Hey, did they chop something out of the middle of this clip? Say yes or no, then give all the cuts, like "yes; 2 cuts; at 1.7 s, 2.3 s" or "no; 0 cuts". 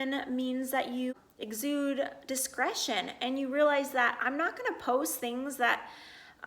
yes; 1 cut; at 1.1 s